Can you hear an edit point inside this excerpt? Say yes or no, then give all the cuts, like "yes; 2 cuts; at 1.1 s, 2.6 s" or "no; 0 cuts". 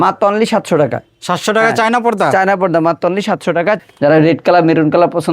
yes; 1 cut; at 3.8 s